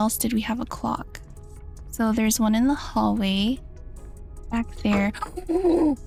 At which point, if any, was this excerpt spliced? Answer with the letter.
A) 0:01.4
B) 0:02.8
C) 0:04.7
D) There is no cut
D